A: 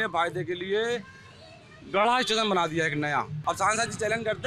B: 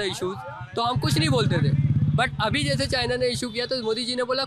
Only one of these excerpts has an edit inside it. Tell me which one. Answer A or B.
A